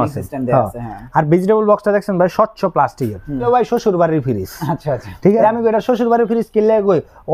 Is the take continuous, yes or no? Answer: no